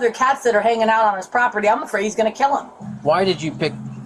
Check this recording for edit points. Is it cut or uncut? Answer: cut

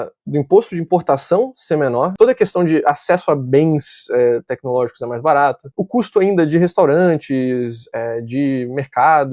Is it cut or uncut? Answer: cut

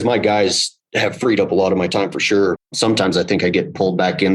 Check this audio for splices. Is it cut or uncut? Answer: cut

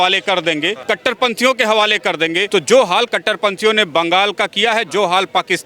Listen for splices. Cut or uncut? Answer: cut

